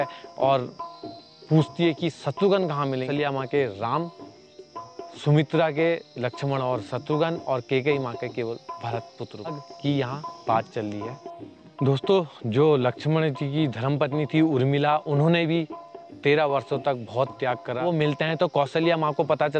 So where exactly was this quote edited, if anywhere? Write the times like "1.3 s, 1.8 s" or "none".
3.1 s, 9.6 s, 17.8 s